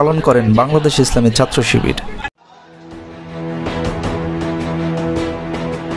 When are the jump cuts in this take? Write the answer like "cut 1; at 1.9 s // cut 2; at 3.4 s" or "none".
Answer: cut 1; at 2.3 s